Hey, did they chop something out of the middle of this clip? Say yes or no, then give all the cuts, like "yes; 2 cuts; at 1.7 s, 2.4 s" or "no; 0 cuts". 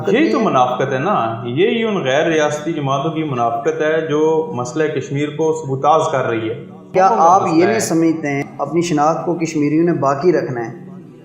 yes; 2 cuts; at 6.9 s, 8.4 s